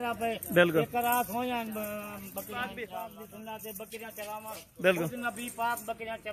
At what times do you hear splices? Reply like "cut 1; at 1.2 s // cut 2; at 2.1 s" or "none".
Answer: cut 1; at 2.8 s